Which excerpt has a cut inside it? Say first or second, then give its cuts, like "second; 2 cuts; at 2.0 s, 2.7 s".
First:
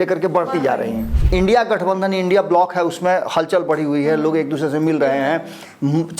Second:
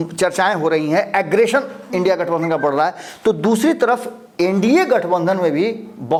first; 1 cut; at 1.2 s